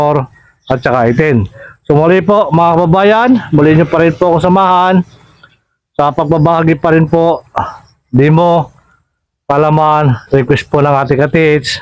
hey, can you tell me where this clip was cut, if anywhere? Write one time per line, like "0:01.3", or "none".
none